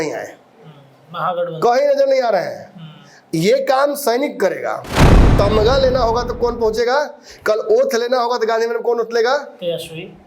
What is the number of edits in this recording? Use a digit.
1